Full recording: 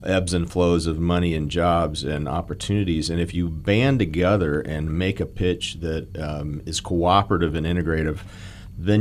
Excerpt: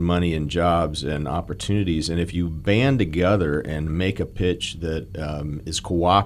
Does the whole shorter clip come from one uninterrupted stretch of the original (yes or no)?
yes